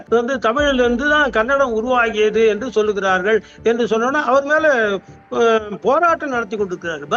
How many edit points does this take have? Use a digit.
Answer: 0